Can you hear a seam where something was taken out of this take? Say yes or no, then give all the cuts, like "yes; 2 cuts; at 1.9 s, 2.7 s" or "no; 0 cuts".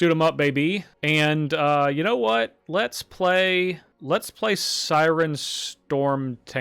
yes; 2 cuts; at 0.9 s, 3.9 s